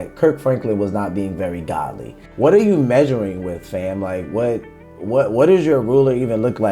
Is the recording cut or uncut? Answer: cut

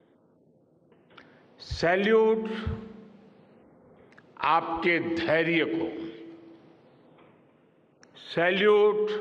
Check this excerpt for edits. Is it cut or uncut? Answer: uncut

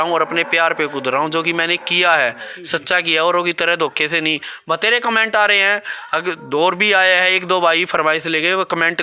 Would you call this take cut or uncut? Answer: uncut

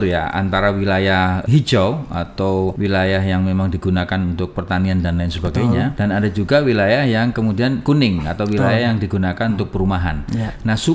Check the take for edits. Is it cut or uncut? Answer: cut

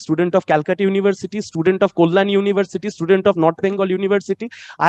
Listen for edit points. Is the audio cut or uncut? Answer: uncut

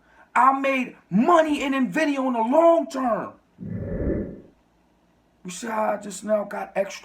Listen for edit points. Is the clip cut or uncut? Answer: cut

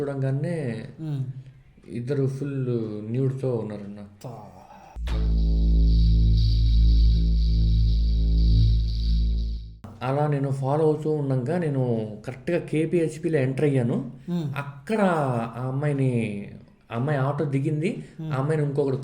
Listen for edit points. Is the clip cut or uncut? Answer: cut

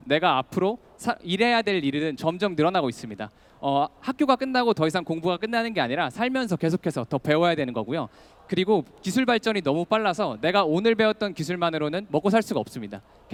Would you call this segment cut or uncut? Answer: uncut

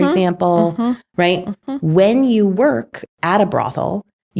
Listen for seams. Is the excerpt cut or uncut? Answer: uncut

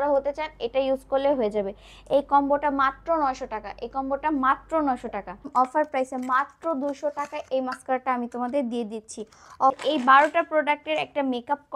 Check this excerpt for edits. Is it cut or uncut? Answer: cut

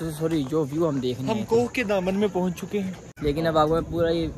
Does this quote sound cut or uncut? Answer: cut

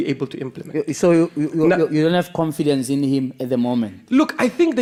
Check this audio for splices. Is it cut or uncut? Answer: uncut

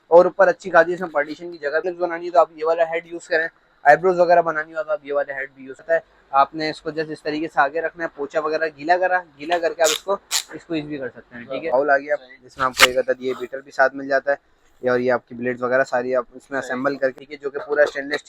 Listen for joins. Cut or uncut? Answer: cut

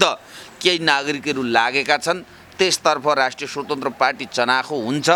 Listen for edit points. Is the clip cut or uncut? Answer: uncut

